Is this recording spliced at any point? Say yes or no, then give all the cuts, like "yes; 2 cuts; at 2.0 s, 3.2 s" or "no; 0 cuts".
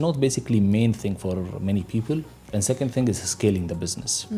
no; 0 cuts